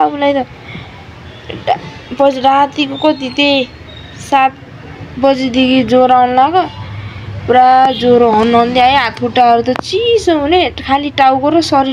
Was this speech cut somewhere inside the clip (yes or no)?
no